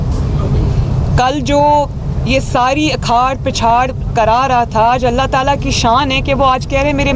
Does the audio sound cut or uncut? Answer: uncut